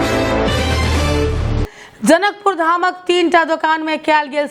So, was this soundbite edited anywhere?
yes; 1 cut; at 1.6 s

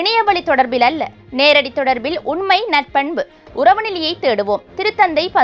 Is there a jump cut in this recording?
no; 0 cuts

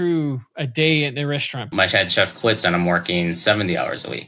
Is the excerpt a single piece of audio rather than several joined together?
no; 1 cut; at 1.7 s

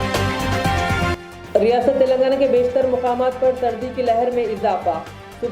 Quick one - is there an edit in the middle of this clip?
yes; 1 cut; at 1.1 s

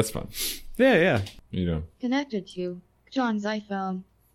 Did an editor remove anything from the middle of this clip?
yes; 1 cut; at 1.4 s

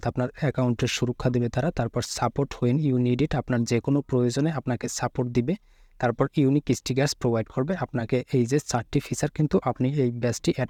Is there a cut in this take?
no; 0 cuts

